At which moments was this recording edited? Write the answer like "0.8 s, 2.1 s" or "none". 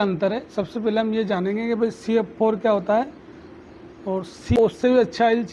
4.6 s